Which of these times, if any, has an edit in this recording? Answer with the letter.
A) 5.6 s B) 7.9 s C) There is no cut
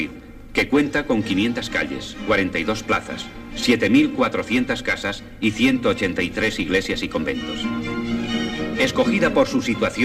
A